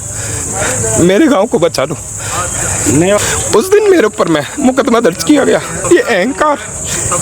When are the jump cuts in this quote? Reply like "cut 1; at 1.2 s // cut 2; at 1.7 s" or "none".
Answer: cut 1; at 3.2 s // cut 2; at 5.7 s